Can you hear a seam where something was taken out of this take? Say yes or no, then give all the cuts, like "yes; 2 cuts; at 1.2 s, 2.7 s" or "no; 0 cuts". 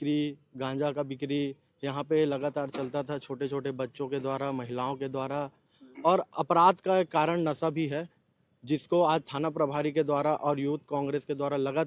no; 0 cuts